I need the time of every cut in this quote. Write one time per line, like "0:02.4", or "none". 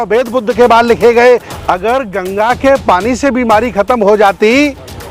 0:01.5